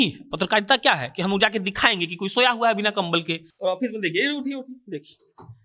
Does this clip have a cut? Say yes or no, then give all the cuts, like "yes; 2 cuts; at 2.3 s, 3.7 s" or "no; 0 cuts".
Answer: yes; 1 cut; at 3.4 s